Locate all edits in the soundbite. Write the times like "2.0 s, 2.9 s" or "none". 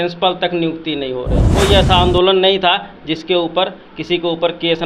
1.5 s